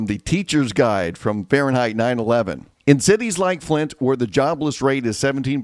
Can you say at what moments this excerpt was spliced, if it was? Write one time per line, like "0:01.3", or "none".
0:02.6